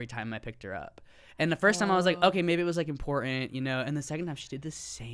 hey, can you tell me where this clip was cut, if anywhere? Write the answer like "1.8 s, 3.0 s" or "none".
none